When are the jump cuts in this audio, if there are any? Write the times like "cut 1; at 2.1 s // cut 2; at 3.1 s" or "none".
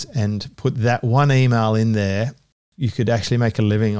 cut 1; at 2.6 s